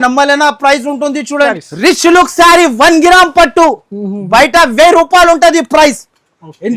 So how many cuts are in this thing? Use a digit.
1